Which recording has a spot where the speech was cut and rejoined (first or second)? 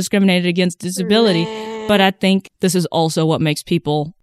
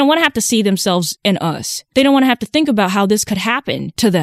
second